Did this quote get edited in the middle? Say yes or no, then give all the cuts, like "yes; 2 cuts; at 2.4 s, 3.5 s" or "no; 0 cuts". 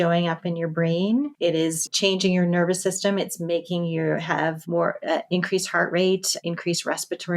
yes; 3 cuts; at 1.7 s, 4.6 s, 6.3 s